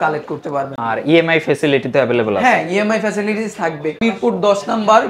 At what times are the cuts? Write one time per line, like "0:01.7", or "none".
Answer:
0:04.0